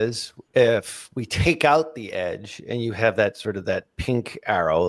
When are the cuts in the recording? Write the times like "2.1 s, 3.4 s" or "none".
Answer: none